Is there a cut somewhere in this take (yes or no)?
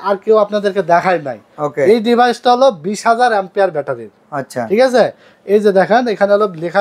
no